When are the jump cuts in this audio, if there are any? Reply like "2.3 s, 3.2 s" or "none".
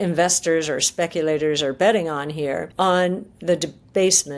2.7 s